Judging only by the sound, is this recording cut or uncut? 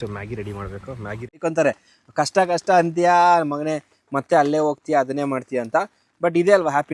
cut